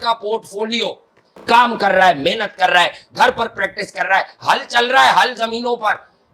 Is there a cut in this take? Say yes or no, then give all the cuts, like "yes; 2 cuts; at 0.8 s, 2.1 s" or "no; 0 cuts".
yes; 1 cut; at 1.3 s